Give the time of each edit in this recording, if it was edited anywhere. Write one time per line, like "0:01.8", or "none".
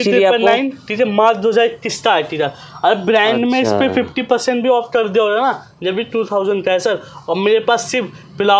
none